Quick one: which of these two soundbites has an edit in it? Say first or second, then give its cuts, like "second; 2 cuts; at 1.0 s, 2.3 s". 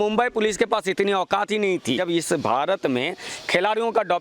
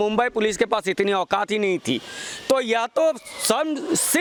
first; 1 cut; at 2.0 s